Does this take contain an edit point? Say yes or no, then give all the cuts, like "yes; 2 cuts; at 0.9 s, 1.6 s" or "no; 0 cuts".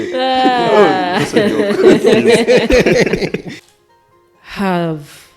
yes; 1 cut; at 3.6 s